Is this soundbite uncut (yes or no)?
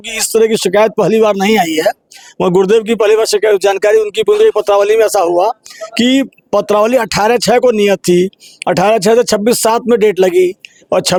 yes